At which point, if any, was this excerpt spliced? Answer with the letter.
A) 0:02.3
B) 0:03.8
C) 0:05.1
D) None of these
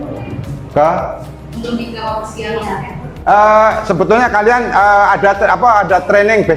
D